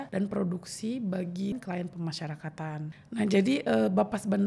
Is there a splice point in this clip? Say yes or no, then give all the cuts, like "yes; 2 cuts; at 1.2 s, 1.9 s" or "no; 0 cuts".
yes; 2 cuts; at 1.5 s, 2.9 s